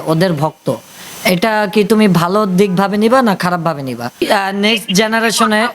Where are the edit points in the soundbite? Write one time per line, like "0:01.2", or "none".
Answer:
0:04.2